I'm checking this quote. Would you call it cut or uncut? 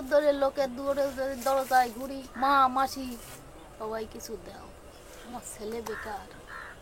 cut